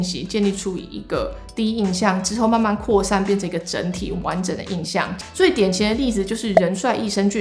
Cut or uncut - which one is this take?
cut